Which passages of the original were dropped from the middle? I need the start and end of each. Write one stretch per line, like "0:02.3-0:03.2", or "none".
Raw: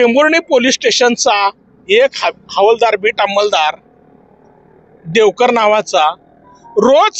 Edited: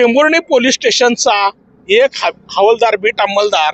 none